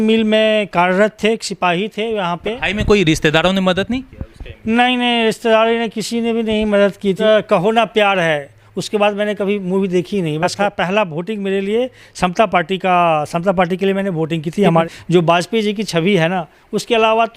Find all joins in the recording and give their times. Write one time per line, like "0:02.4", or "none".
0:02.6
0:07.2
0:10.5
0:14.9